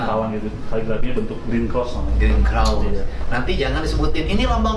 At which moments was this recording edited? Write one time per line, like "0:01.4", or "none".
none

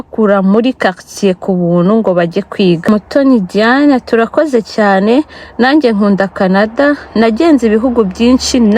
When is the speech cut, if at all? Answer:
0:02.9

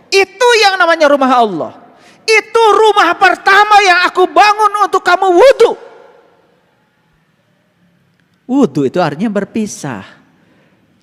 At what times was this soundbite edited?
none

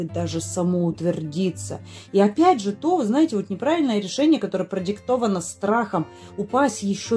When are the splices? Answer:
none

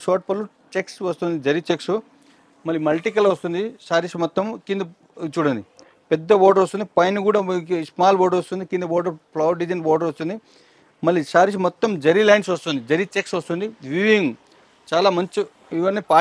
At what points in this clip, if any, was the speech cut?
none

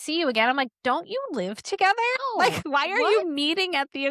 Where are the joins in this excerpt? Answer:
0:02.6

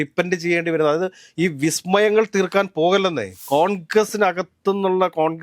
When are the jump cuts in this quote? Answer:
0:03.3

